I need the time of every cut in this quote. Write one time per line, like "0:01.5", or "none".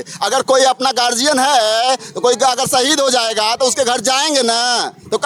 none